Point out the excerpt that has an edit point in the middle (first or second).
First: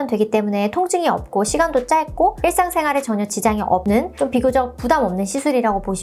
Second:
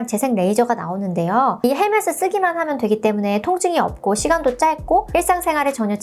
second